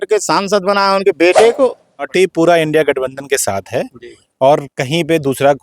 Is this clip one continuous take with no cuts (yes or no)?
no